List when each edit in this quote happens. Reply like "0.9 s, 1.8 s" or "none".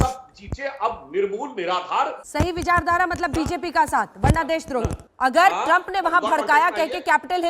2.2 s, 5.0 s